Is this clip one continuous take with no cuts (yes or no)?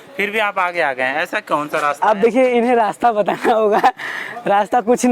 yes